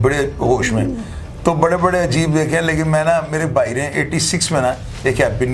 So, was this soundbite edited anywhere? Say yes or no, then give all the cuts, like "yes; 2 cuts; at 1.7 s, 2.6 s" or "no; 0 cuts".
no; 0 cuts